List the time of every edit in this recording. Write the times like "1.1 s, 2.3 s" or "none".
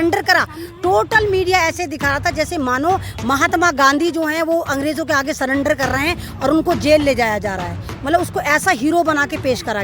none